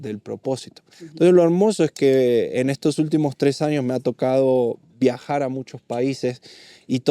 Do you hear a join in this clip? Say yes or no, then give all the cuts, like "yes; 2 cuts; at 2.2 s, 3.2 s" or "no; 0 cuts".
no; 0 cuts